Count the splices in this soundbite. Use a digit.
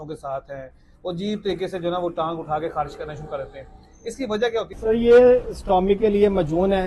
1